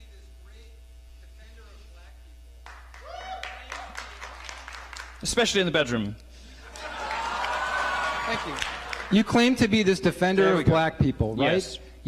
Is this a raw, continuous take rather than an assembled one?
no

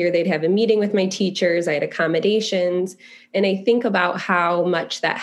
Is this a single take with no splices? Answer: yes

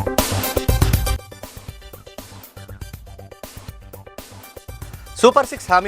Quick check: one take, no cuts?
no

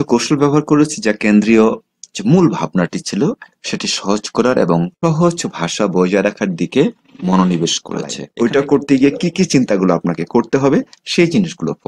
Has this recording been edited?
yes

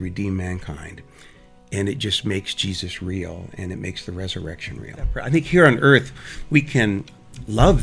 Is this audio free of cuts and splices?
no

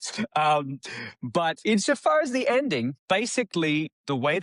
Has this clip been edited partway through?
yes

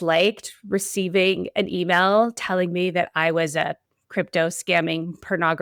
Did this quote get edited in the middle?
no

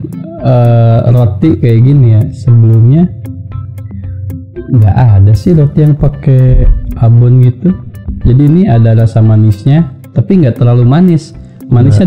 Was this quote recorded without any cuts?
yes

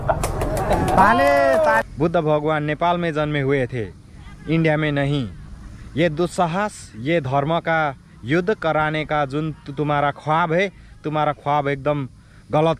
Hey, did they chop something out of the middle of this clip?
yes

